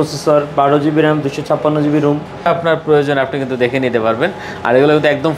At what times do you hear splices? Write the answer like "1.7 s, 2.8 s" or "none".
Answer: 2.5 s